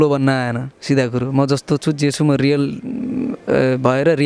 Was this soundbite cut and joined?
no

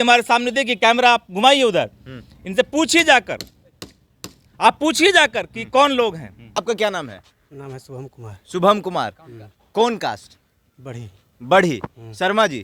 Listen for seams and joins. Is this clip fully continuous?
no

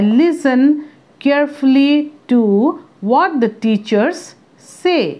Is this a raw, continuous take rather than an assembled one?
yes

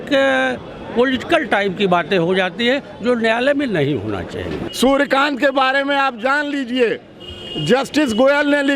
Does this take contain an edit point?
yes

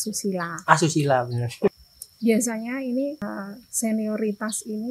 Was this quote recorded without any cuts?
no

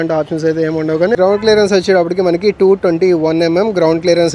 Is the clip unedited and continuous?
no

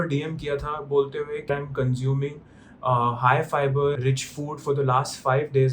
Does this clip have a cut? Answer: yes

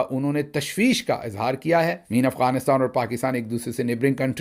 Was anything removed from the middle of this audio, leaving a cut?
yes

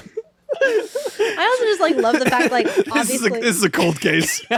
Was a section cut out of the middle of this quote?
no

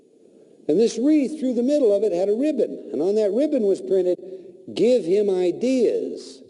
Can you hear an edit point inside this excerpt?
yes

